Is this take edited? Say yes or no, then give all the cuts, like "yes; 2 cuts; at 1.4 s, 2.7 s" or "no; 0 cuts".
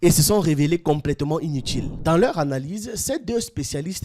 yes; 1 cut; at 1.9 s